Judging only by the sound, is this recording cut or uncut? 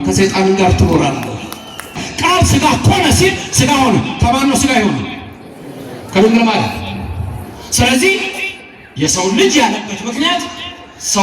cut